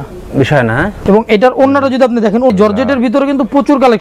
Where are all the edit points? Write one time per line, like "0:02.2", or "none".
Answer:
0:02.5